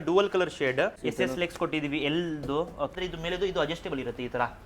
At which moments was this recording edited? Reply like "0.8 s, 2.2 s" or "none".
1.0 s, 2.9 s